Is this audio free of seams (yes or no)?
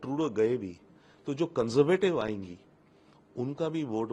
yes